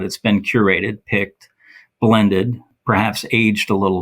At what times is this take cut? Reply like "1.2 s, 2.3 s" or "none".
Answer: 2.7 s